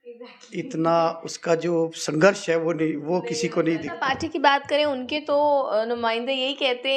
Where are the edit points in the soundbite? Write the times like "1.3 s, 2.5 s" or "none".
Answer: 3.9 s